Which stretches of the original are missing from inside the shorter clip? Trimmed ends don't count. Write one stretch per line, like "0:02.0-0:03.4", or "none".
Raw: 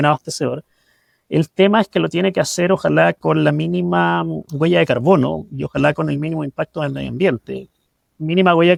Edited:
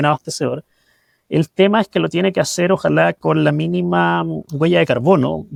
none